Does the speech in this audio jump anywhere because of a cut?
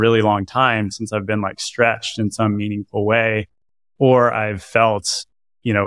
no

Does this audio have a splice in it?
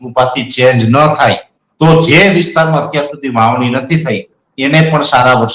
no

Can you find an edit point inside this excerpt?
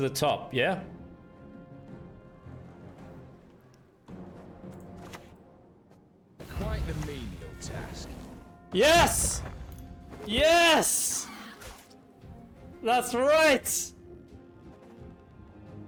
no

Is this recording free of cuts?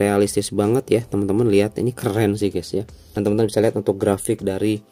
no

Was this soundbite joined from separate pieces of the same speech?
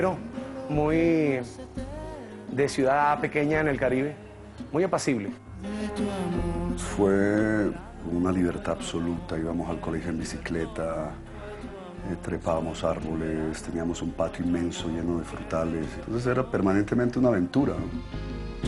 no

